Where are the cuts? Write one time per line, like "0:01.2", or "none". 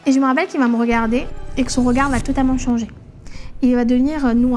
none